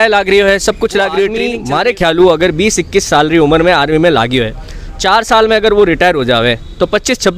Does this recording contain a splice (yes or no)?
yes